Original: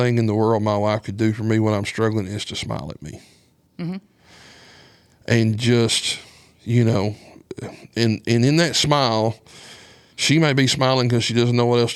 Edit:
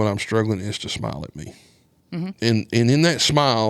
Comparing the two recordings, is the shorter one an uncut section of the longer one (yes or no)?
no